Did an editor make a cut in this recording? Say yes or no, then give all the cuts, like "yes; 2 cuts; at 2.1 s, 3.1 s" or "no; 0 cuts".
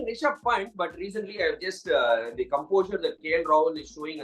no; 0 cuts